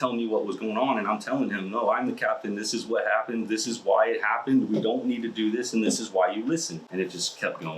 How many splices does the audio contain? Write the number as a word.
one